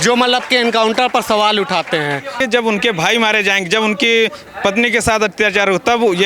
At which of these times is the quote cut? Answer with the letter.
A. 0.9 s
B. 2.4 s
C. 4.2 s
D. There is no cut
B